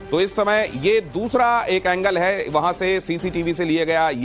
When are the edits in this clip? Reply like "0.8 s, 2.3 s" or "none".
3.3 s